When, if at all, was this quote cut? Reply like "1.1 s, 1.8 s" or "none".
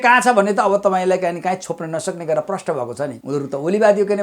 3.2 s